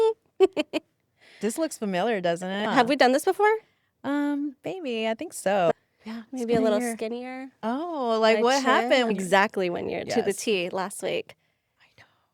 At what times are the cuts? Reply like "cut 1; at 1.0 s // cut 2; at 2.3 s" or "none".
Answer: cut 1; at 2.6 s // cut 2; at 5.7 s // cut 3; at 9.1 s

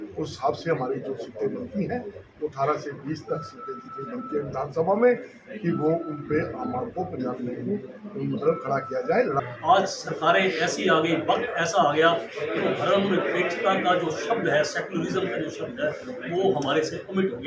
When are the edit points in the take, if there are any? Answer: cut 1; at 9.4 s

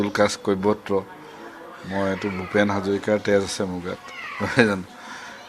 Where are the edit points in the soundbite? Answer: none

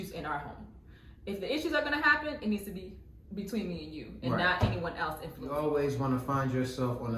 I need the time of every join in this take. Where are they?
cut 1; at 5.5 s

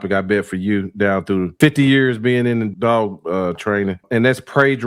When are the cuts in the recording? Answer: cut 1; at 1.5 s // cut 2; at 2.7 s // cut 3; at 4.0 s

